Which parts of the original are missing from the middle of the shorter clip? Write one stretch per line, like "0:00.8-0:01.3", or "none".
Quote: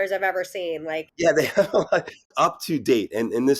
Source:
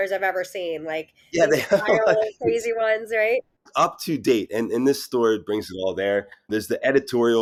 0:01.1-0:01.2
0:02.2-0:03.4